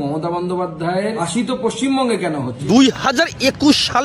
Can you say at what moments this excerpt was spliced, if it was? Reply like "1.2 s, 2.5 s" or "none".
1.2 s, 2.5 s